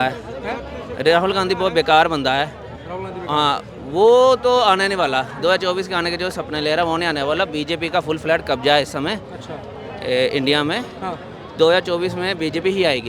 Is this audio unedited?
yes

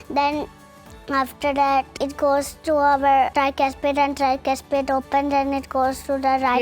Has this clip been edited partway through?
yes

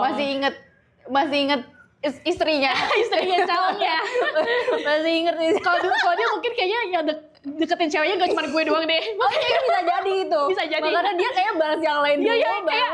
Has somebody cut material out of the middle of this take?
no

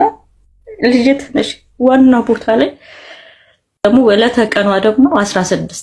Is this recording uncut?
no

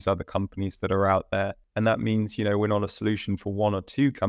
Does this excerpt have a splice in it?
yes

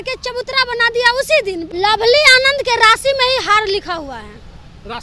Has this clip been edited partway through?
yes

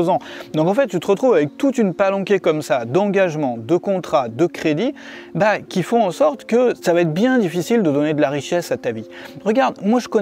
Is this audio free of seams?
no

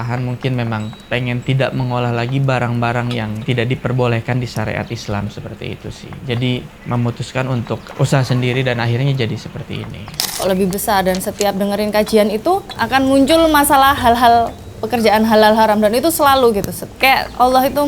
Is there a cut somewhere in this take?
yes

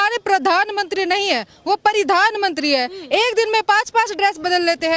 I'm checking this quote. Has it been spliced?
no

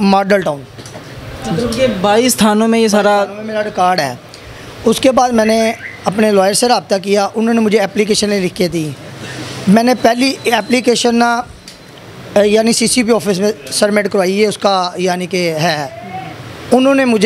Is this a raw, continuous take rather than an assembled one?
yes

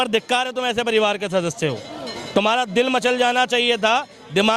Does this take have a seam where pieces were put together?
no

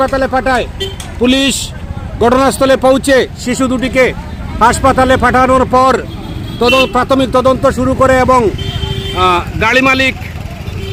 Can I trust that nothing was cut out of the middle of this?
yes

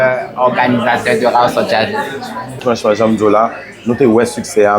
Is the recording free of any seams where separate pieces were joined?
no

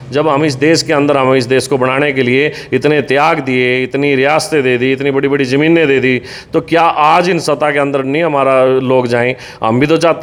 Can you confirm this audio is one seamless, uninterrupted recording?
yes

